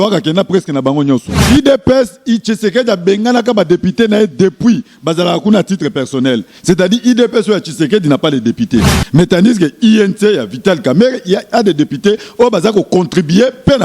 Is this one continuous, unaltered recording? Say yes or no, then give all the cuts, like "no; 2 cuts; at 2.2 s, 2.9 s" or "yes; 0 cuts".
no; 1 cut; at 1.4 s